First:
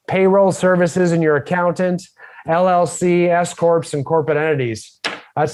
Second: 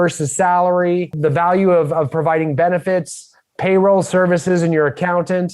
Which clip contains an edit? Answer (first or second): second